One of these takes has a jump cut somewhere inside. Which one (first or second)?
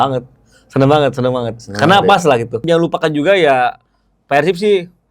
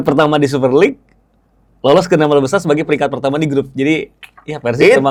first